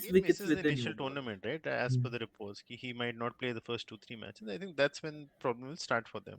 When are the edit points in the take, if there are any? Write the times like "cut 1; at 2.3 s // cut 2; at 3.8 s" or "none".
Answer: cut 1; at 0.9 s